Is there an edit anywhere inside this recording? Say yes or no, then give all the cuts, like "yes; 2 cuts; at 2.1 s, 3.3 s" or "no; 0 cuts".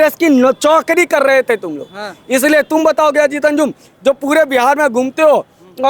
no; 0 cuts